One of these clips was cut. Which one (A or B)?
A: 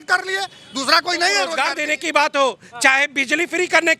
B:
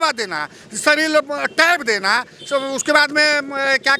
A